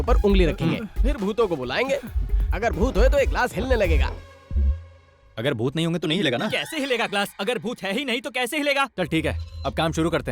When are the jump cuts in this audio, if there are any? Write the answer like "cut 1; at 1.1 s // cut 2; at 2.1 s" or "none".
cut 1; at 8.9 s